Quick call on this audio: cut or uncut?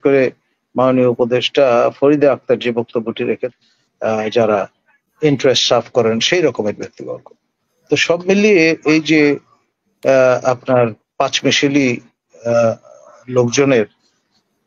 cut